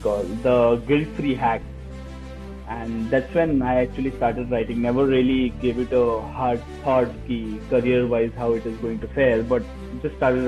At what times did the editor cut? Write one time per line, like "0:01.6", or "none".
none